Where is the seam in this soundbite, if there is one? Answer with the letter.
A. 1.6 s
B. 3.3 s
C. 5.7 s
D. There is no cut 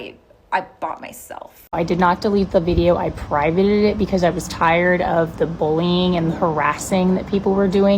A